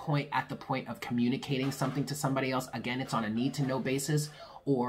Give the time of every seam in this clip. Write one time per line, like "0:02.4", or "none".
none